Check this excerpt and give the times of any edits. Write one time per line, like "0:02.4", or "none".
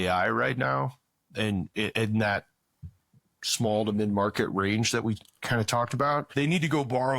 0:06.3